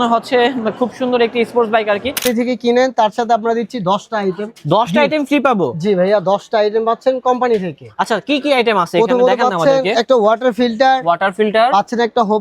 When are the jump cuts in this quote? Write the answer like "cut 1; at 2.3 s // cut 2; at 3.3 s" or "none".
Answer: cut 1; at 2.2 s